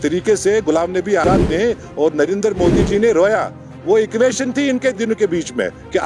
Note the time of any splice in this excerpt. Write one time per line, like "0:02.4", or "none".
0:01.2